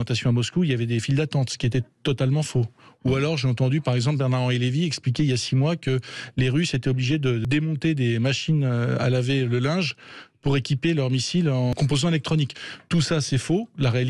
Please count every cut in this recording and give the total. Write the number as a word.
two